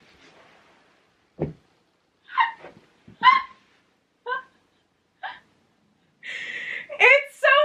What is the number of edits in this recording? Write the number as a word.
zero